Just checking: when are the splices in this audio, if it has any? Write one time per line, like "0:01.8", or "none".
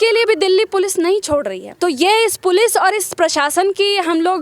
0:01.6